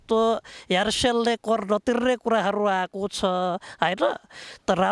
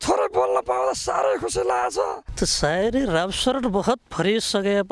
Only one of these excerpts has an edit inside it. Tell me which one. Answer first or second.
second